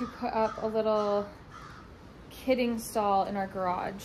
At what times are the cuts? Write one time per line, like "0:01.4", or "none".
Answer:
none